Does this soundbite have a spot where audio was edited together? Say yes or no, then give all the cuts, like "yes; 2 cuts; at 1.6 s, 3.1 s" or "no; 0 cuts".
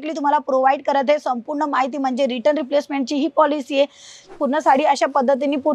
yes; 1 cut; at 4.1 s